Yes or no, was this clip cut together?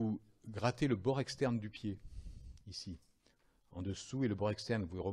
no